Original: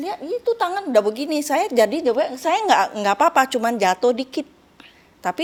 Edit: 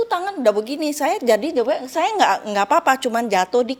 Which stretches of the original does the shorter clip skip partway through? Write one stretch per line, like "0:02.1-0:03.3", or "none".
none